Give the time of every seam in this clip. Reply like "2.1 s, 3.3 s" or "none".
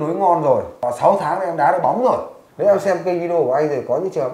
2.4 s